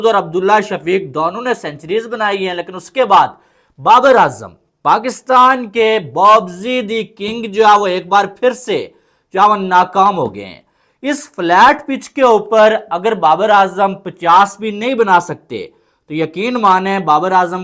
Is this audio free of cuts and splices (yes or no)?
yes